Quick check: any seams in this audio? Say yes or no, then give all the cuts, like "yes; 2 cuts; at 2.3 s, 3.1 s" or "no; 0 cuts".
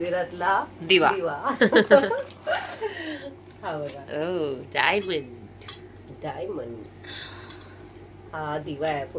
no; 0 cuts